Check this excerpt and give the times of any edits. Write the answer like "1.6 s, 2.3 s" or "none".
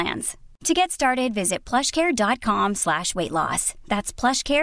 none